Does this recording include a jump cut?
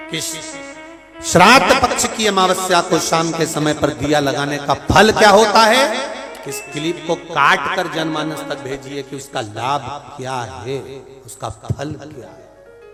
no; 0 cuts

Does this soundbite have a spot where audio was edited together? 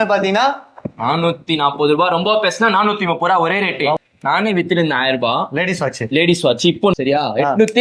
yes; 2 cuts; at 4.0 s, 6.9 s

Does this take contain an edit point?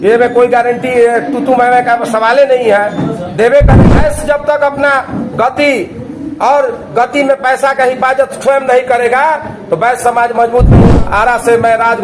yes; 2 cuts; at 3.7 s, 10.7 s

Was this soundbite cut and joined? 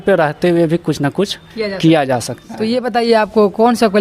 yes; 1 cut; at 2.4 s

